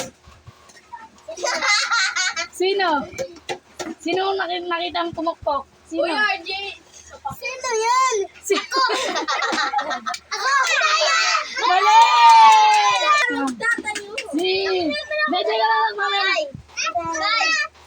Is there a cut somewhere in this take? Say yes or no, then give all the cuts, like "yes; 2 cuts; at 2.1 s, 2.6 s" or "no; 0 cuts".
yes; 1 cut; at 13.2 s